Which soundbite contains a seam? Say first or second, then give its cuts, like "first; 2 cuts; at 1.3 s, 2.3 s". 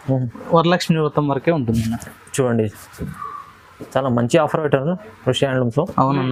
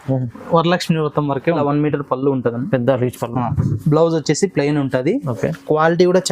second; 1 cut; at 1.6 s